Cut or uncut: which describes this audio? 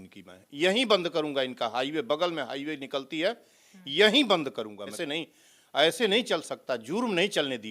cut